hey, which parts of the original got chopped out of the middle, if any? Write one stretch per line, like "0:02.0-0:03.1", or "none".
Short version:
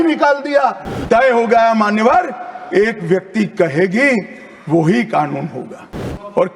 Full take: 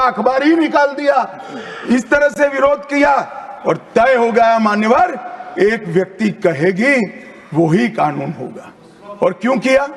0:01.5-0:03.8